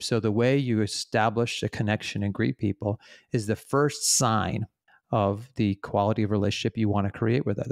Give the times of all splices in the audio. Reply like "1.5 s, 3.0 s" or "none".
none